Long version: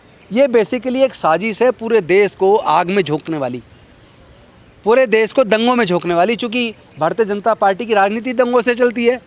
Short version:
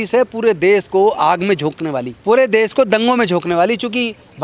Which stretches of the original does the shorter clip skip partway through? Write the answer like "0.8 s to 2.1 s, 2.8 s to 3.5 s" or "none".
3.6 s to 4.7 s